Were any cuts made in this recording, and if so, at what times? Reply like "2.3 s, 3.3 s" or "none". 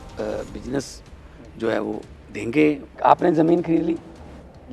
2.9 s